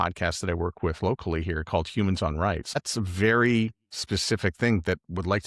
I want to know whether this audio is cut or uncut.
cut